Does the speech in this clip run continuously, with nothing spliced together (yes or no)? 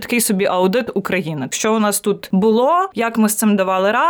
no